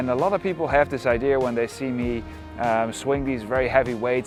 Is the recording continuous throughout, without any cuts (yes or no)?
yes